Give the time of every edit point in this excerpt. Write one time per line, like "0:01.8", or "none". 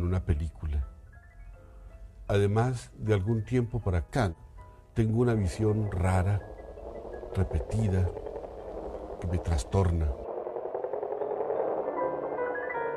none